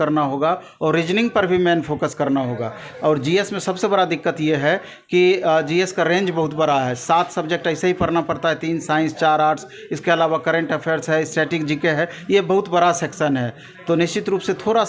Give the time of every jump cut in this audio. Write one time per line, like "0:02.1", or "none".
none